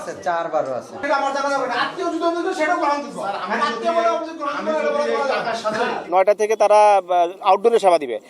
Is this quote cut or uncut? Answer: cut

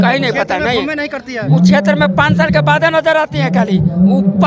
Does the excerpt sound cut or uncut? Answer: uncut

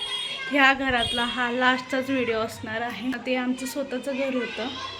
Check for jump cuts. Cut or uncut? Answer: cut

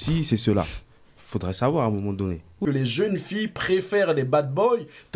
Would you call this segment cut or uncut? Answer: cut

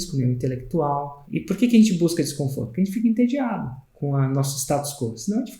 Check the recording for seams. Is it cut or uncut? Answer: cut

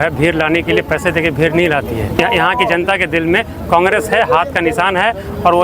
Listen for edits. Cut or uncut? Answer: cut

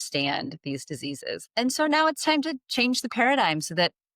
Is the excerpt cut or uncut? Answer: cut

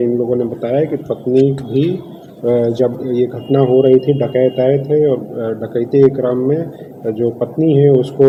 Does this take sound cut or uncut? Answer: uncut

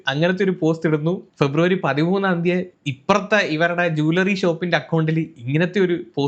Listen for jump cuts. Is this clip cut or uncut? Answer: uncut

